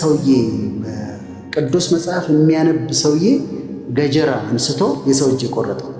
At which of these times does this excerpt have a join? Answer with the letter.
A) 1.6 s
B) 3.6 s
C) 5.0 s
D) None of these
C